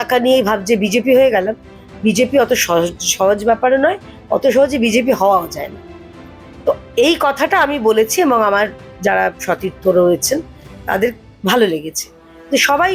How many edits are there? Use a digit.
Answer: 0